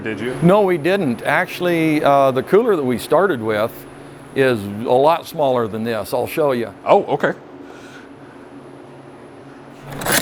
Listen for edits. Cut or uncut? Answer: uncut